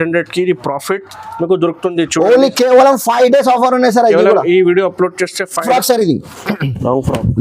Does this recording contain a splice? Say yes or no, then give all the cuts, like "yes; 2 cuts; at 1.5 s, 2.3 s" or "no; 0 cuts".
yes; 1 cut; at 5.6 s